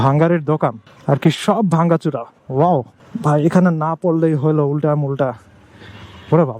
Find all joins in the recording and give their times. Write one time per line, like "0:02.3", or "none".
0:00.9
0:03.0